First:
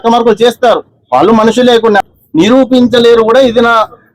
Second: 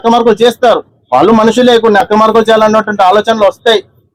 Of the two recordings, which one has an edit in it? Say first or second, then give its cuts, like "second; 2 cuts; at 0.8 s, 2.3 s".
first; 1 cut; at 2.1 s